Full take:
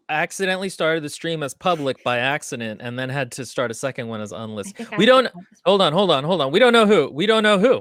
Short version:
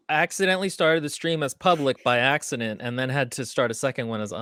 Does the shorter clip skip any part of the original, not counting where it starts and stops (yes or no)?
no